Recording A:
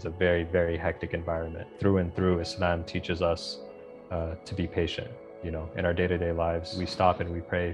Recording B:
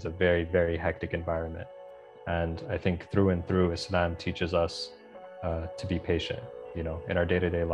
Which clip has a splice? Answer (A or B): A